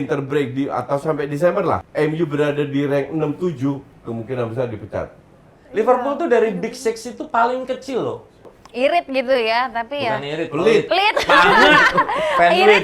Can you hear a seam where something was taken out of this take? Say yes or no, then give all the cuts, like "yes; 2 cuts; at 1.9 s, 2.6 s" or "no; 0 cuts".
yes; 3 cuts; at 1.9 s, 5.6 s, 8.5 s